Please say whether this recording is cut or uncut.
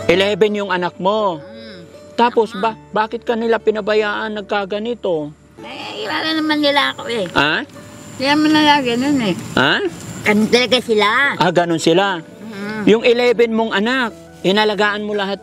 uncut